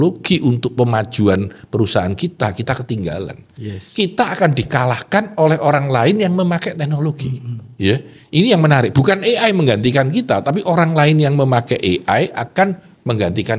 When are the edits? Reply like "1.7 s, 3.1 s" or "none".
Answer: none